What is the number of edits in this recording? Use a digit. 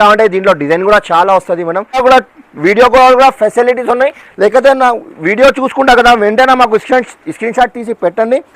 1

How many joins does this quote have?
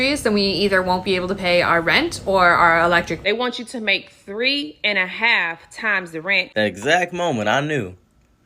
2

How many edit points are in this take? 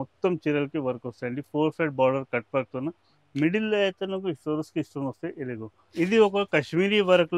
1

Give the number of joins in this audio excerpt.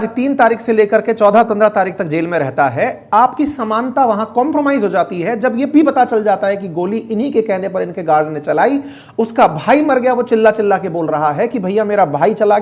0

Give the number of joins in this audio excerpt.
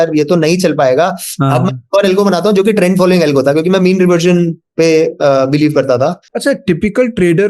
1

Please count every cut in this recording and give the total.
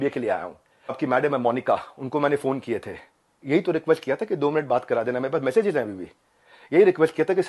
1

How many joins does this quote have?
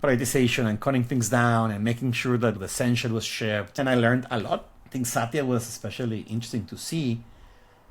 2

